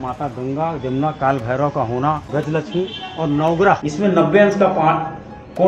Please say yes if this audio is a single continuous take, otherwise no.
no